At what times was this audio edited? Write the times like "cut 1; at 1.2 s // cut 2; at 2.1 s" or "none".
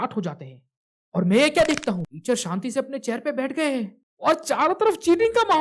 cut 1; at 2.1 s